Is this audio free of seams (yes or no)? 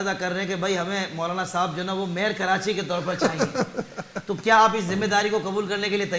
yes